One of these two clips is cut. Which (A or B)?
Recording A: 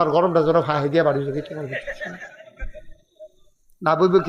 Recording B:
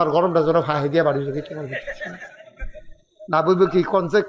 B